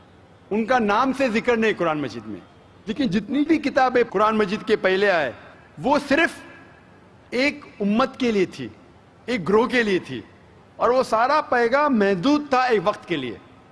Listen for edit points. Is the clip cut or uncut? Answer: uncut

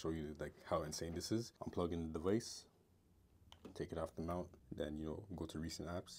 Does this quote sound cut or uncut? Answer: cut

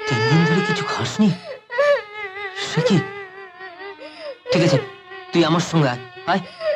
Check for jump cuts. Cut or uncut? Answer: uncut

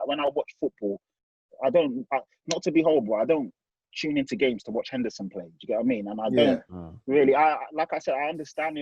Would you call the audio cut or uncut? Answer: uncut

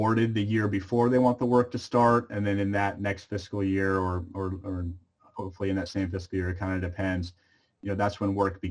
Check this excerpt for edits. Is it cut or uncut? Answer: uncut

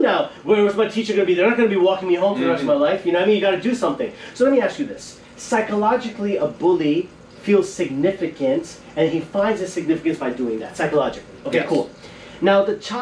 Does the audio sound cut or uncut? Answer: uncut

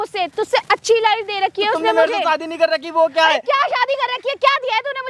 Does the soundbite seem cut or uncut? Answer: uncut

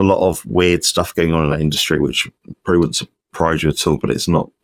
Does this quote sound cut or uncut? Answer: uncut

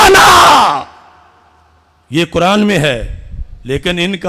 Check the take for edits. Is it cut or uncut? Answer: uncut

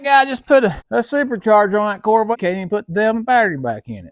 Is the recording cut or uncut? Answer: cut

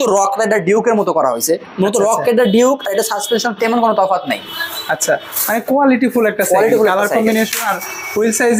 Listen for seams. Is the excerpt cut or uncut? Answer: uncut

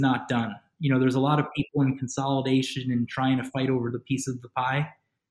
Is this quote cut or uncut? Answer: uncut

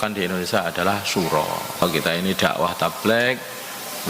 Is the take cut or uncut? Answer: cut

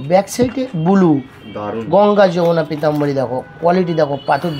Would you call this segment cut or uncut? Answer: uncut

